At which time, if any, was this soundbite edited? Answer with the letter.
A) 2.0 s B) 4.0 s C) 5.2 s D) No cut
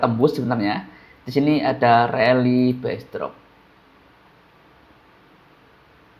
D